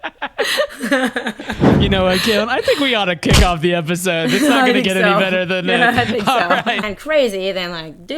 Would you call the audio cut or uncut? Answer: cut